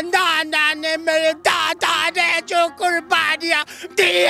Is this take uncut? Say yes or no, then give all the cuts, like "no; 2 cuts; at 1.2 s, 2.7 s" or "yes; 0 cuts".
yes; 0 cuts